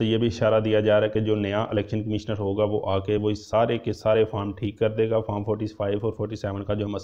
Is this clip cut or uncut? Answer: uncut